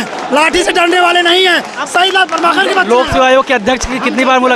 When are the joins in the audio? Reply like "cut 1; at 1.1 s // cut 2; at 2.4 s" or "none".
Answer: none